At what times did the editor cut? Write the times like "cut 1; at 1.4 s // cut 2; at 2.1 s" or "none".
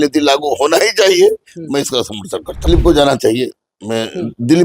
cut 1; at 2.7 s